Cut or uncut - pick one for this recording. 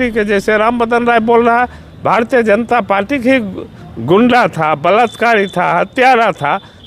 uncut